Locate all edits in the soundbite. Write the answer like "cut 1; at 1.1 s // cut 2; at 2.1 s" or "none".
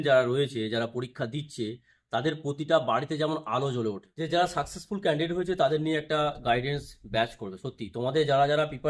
cut 1; at 4.1 s